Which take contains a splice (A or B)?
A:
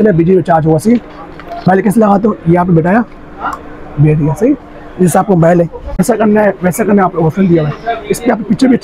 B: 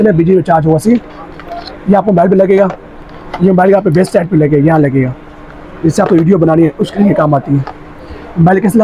A